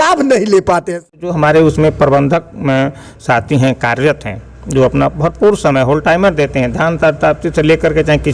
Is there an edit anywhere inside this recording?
yes; 1 cut; at 1.2 s

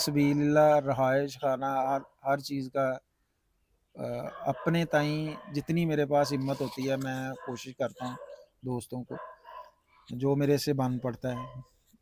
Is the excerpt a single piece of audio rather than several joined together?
yes; 0 cuts

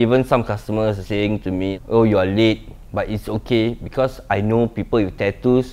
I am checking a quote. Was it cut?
yes; 1 cut; at 1.0 s

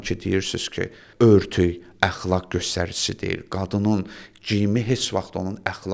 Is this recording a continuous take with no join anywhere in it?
yes; 0 cuts

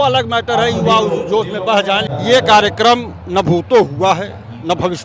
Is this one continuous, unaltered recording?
no; 1 cut; at 2.1 s

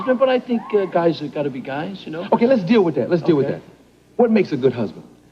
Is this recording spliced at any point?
yes; 1 cut; at 1.2 s

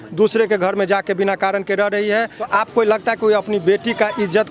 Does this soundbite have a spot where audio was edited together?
yes; 1 cut; at 2.5 s

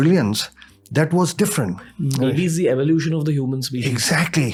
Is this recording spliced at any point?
no; 0 cuts

